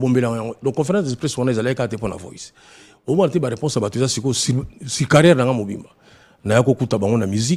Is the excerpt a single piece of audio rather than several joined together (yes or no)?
yes